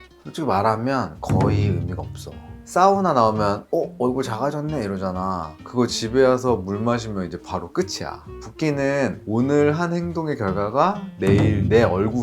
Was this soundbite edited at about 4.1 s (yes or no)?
no